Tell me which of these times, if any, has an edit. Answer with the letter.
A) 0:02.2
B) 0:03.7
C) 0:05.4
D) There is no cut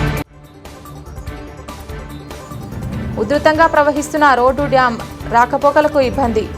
A